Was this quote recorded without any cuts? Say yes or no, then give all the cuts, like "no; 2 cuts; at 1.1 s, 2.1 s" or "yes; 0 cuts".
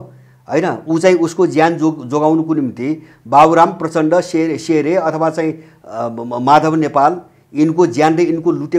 yes; 0 cuts